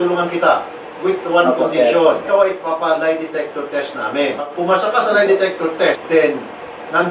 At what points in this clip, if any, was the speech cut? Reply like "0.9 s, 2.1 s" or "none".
2.3 s, 4.5 s, 6.0 s

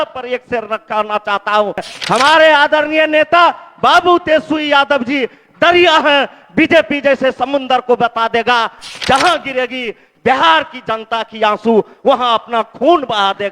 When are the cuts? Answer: 1.9 s

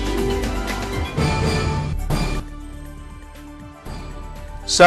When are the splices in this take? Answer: 1.6 s

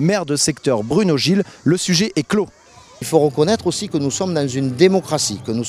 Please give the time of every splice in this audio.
2.6 s

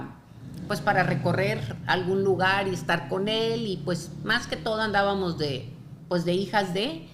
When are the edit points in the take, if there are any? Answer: none

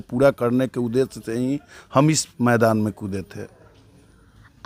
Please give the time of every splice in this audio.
none

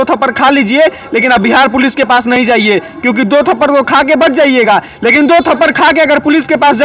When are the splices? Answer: none

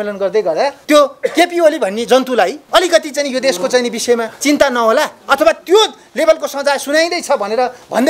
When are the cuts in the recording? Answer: 0.8 s, 2.6 s, 4.3 s

